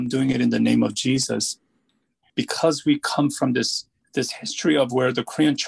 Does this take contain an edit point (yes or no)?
yes